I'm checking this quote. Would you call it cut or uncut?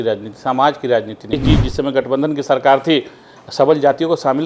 cut